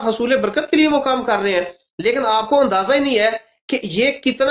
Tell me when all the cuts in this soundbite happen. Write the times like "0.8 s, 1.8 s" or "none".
none